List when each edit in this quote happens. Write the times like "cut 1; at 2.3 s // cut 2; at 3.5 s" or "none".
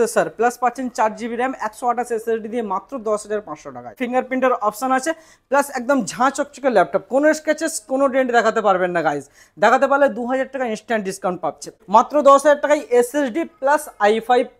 cut 1; at 4.0 s // cut 2; at 11.6 s